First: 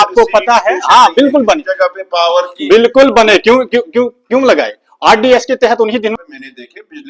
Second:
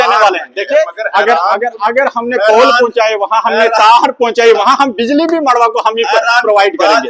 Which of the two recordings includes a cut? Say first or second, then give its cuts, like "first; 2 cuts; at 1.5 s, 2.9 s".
first; 1 cut; at 6.2 s